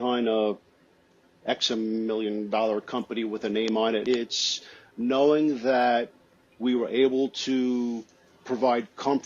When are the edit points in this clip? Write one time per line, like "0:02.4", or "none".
0:04.0